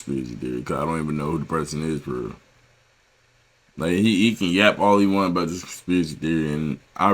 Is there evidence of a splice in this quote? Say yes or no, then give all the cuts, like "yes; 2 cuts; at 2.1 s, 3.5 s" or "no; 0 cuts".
no; 0 cuts